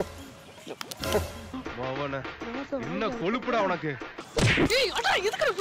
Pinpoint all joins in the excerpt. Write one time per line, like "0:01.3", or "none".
none

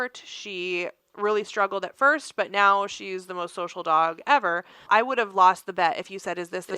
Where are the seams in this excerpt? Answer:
0:04.9

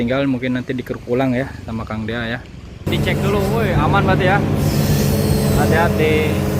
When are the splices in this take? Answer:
0:02.9

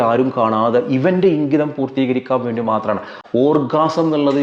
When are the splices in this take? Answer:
0:03.1

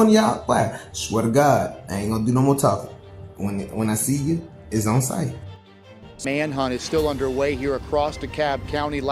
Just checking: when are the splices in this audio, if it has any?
0:05.9

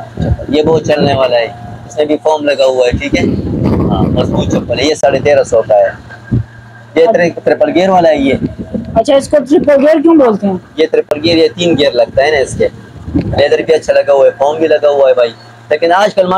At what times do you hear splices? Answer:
none

